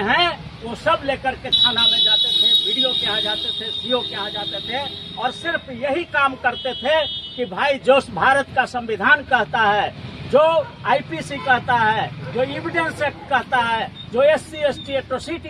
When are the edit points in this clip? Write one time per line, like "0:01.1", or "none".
none

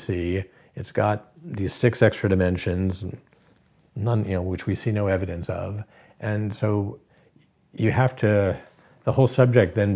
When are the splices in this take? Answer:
none

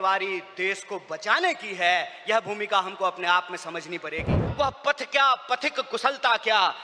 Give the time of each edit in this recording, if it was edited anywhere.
0:04.4

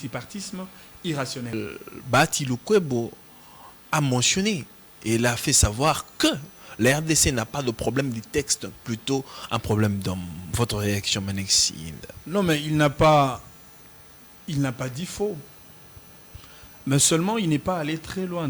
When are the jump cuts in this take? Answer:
0:01.5

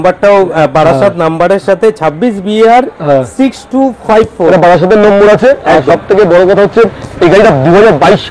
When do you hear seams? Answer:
none

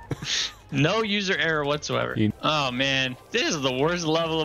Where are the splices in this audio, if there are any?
0:02.3

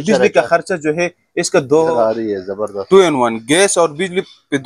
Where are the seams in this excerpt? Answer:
0:01.9

